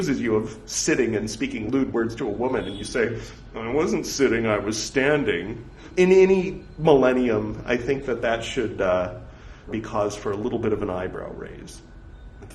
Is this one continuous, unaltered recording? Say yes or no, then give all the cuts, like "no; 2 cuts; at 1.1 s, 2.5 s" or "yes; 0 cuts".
no; 3 cuts; at 1.6 s, 5.9 s, 9.7 s